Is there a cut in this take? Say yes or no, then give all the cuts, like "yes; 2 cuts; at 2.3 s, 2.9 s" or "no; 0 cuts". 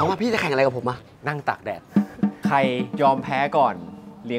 yes; 2 cuts; at 1.1 s, 2.9 s